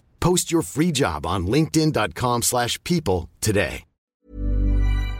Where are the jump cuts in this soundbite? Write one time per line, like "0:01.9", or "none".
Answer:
0:04.1